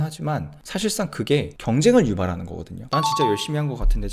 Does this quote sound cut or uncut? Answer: cut